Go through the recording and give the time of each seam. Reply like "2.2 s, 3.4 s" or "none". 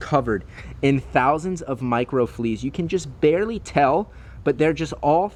none

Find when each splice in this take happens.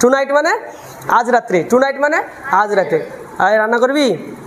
none

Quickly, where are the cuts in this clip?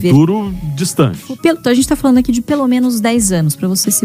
1.2 s

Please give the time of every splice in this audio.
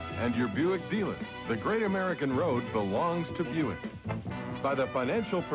4.3 s

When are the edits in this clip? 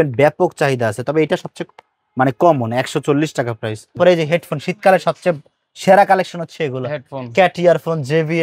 3.9 s

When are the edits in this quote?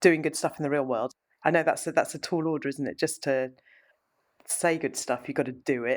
1.2 s

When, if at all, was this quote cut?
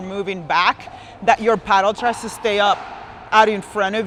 none

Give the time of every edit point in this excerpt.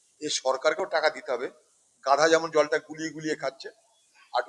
none

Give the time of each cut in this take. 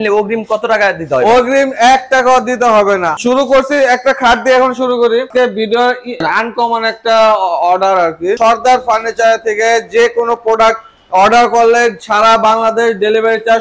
3.1 s, 5.3 s, 8.4 s

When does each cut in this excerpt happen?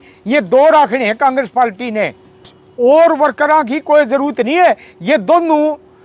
2.6 s

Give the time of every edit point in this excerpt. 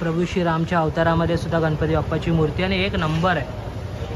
none

